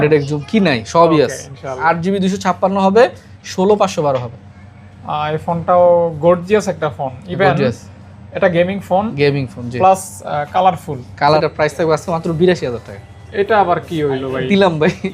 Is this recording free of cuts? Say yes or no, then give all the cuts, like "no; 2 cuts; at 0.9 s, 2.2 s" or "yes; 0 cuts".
no; 2 cuts; at 1.8 s, 11.4 s